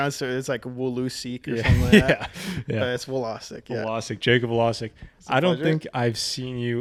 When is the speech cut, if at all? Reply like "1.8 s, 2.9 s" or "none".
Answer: none